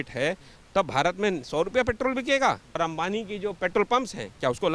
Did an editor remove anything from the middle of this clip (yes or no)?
yes